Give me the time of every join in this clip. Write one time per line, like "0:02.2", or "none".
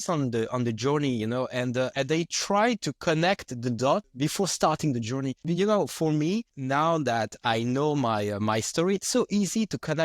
0:01.9
0:04.1
0:05.4
0:06.5